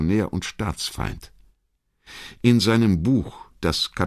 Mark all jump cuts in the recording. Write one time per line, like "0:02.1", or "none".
0:01.1